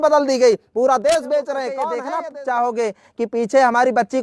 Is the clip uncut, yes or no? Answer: no